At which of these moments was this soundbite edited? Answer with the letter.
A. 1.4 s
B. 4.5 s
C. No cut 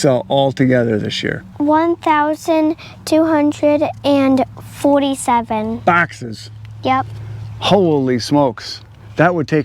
A